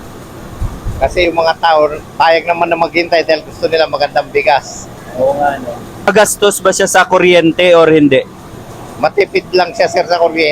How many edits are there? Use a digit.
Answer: 1